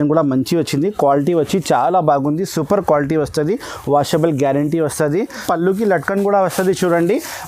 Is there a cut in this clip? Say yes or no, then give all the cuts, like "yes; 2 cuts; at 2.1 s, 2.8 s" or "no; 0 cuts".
yes; 1 cut; at 5.4 s